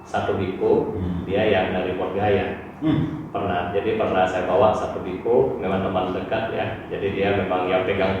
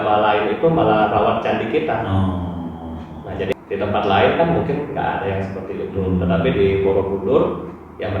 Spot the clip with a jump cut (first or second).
second